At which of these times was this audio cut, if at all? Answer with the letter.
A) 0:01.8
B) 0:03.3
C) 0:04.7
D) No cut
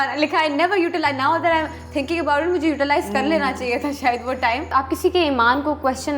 C